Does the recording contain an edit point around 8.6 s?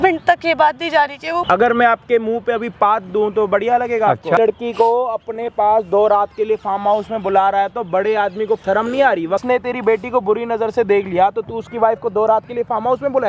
yes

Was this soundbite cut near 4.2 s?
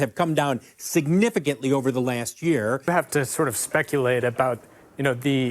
no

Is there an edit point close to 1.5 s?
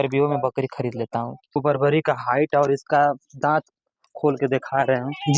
yes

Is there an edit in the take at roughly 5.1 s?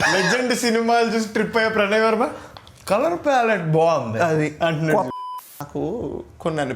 yes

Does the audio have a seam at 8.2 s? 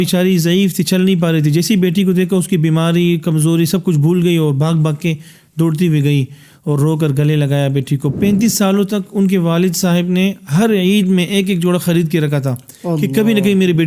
yes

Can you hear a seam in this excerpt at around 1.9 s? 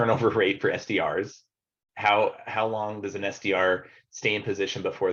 no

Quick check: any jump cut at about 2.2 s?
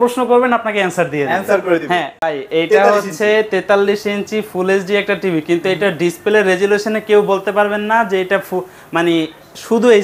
yes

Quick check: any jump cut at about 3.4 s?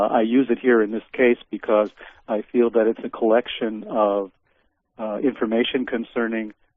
no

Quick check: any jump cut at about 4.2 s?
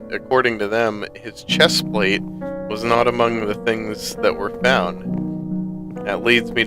no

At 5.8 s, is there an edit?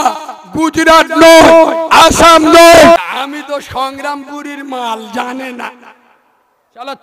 no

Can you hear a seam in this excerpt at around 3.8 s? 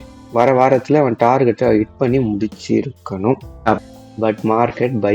yes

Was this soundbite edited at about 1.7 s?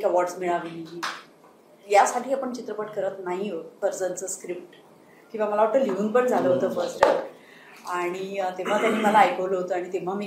no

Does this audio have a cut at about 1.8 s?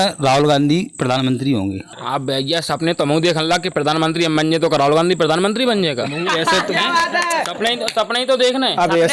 yes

